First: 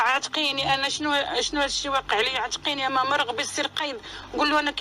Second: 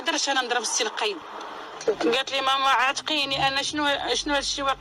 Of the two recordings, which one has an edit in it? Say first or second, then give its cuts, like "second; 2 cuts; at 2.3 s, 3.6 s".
second; 1 cut; at 1.8 s